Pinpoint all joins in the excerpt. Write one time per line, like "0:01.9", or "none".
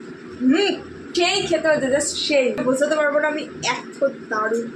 0:01.0
0:02.6